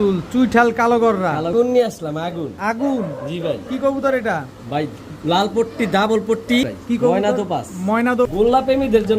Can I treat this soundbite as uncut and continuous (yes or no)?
no